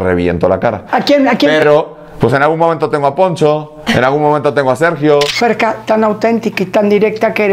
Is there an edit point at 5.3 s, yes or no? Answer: yes